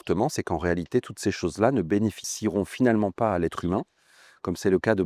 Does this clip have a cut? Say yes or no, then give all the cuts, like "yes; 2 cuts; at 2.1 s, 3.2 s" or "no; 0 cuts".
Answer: yes; 1 cut; at 2.3 s